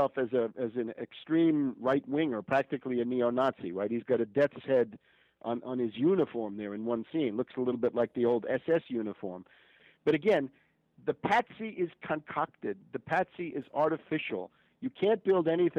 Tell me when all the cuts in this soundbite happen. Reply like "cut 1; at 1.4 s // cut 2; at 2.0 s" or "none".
cut 1; at 9.9 s